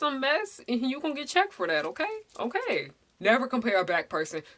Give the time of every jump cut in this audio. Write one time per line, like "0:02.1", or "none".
0:03.0